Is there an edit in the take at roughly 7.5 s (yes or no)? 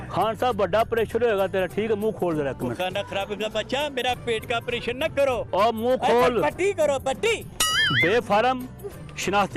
yes